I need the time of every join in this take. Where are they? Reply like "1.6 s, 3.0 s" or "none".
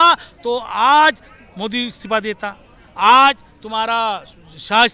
none

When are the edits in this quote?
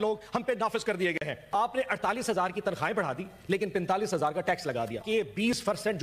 1.5 s, 5.0 s

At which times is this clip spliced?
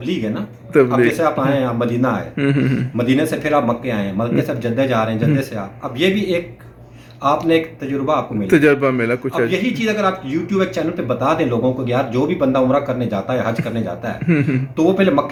none

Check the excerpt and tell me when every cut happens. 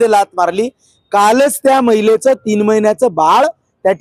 none

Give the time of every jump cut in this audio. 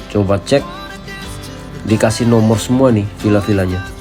none

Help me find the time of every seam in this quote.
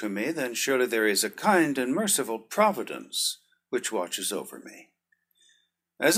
none

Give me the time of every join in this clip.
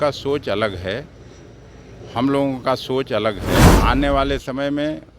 3.7 s

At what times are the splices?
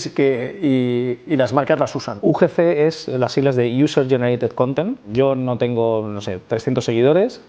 2.1 s, 5.1 s

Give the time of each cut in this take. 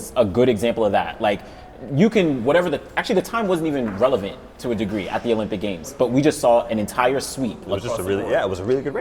none

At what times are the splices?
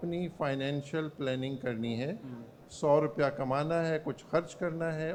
none

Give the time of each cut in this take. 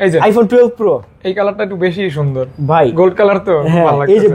none

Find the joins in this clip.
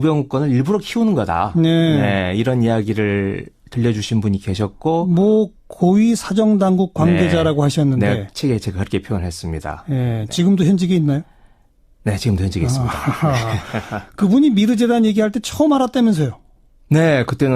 15.0 s

